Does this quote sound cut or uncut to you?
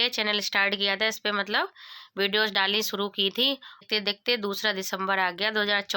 uncut